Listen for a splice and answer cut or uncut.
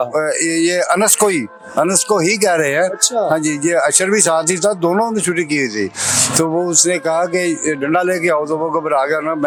uncut